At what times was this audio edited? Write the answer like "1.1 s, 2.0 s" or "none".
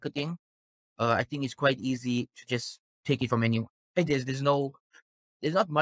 none